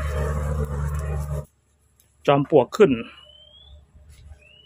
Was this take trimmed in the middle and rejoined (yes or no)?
yes